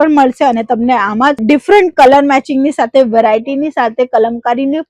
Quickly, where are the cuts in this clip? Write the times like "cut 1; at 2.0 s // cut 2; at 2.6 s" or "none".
none